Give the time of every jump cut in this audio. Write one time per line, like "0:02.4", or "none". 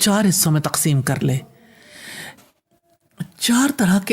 0:02.4